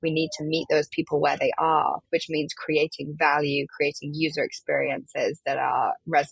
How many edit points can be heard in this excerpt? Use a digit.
1